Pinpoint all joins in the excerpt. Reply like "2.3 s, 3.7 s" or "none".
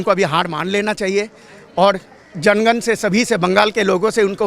none

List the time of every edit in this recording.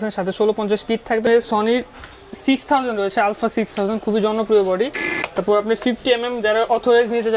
1.2 s, 4.7 s

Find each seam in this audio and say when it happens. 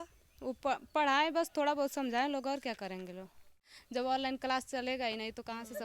3.7 s

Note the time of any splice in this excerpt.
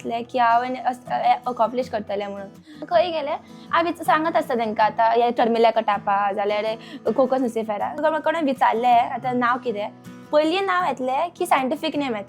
2.7 s, 8.0 s

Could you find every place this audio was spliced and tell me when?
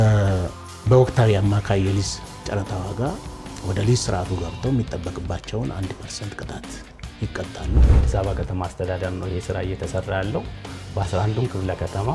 8.0 s

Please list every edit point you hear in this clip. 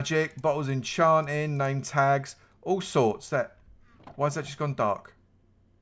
none

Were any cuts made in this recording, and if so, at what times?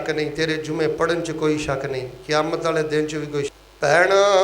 3.5 s

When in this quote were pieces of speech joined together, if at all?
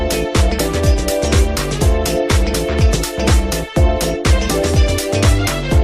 4.6 s

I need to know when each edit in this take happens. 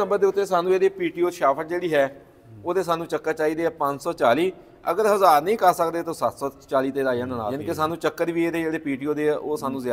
7.5 s

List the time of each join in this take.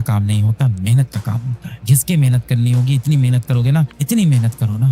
1.8 s

